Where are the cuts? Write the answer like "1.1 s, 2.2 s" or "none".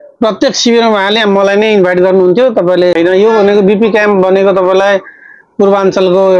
2.9 s